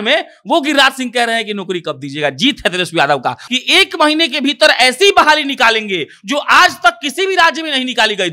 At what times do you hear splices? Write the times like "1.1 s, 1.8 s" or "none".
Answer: 3.4 s